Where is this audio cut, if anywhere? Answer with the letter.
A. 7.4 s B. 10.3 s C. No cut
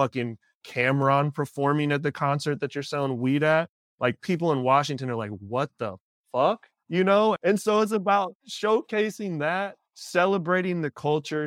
A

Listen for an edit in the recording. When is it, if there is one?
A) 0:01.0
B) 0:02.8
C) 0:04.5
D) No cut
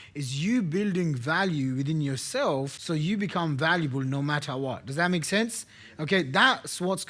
B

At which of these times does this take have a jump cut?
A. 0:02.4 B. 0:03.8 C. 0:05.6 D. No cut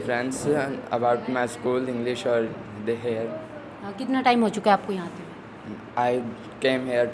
D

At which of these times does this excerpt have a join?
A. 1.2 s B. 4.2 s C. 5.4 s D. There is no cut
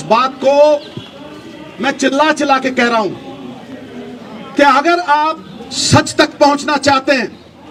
D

